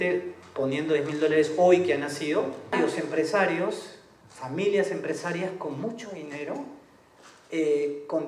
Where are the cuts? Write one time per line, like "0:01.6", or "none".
0:02.7